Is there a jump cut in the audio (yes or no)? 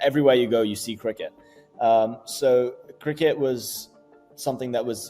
no